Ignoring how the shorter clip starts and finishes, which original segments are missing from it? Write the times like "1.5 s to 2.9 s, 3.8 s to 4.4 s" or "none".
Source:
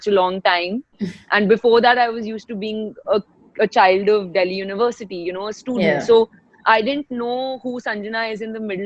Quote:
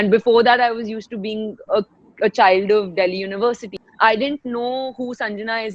5.2 s to 6.5 s